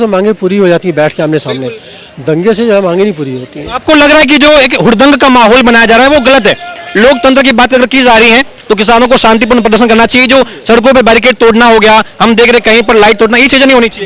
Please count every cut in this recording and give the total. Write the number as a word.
zero